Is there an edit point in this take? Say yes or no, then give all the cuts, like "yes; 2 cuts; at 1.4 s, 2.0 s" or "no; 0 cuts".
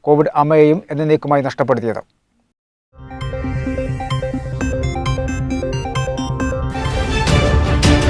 yes; 1 cut; at 6.9 s